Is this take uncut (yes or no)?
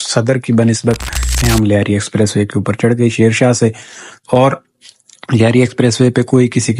no